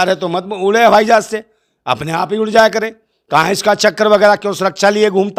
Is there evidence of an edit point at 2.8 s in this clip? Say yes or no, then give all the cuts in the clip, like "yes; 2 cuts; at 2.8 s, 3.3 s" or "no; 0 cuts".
no; 0 cuts